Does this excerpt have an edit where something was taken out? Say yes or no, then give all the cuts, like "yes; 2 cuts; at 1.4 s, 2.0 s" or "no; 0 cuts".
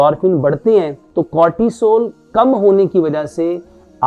yes; 1 cut; at 1.0 s